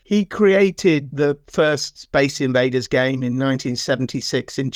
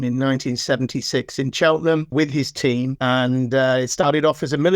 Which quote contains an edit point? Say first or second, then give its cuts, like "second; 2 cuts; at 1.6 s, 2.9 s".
second; 1 cut; at 2.5 s